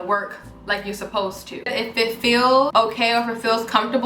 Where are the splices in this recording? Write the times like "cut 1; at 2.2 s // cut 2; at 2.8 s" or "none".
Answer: cut 1; at 1.7 s // cut 2; at 2.7 s

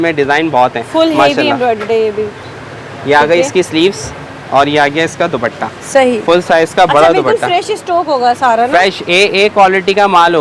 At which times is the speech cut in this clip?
none

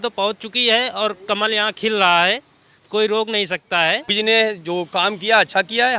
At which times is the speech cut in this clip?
cut 1; at 4.1 s

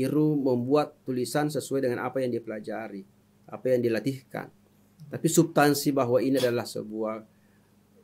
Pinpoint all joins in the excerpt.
none

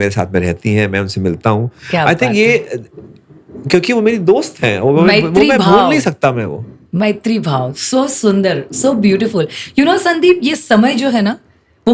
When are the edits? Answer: none

